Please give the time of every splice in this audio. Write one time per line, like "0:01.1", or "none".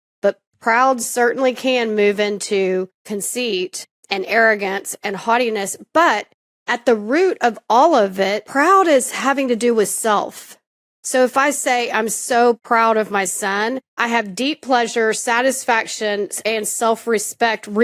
none